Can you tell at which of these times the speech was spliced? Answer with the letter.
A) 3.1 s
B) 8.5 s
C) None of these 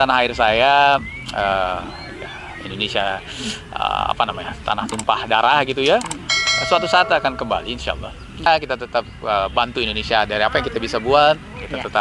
B